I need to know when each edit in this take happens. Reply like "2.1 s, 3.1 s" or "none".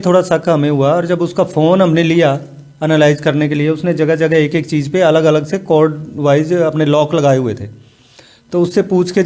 none